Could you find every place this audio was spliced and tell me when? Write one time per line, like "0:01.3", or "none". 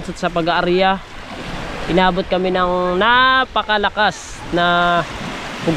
none